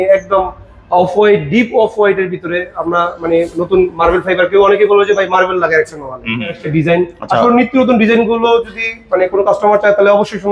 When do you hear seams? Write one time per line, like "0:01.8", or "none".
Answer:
0:06.6